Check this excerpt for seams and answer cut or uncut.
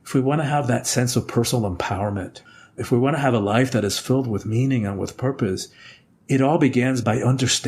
cut